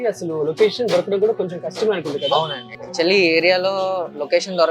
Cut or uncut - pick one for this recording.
cut